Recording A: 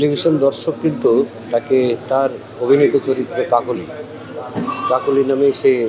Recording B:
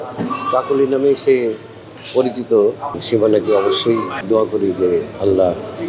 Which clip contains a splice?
B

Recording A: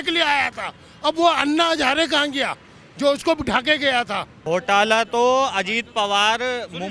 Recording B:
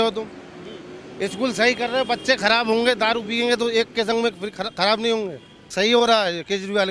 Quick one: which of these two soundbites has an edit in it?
A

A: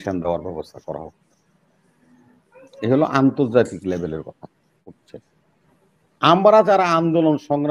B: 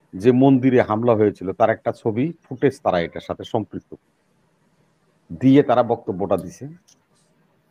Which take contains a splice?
A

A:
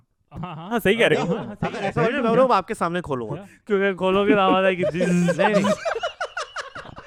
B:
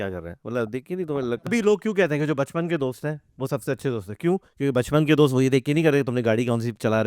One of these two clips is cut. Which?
B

